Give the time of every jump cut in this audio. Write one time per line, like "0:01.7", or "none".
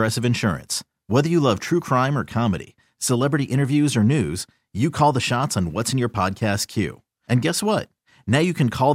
none